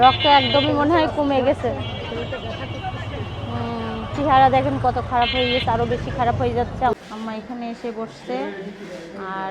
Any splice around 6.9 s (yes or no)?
yes